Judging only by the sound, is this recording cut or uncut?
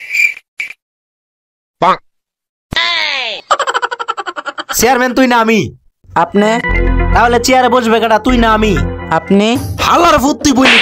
uncut